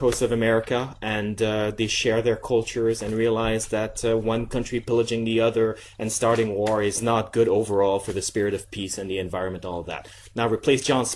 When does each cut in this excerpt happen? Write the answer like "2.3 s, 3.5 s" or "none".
5.9 s